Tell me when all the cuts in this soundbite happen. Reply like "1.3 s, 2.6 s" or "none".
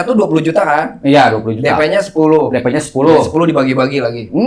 none